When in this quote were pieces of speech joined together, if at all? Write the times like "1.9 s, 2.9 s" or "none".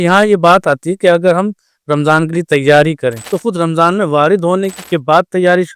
3.3 s, 4.8 s